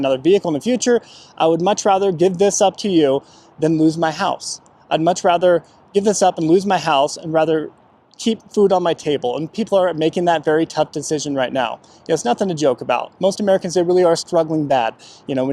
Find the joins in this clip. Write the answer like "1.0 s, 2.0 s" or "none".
none